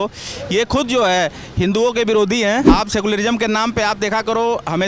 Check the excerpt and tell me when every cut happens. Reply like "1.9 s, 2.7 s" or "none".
2.7 s